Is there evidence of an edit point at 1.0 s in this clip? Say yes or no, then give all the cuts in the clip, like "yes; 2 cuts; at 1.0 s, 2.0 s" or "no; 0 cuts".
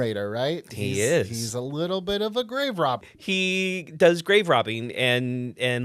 no; 1 cut; at 3.1 s